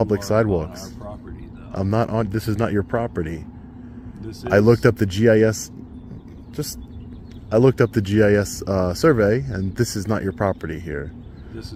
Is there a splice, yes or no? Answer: no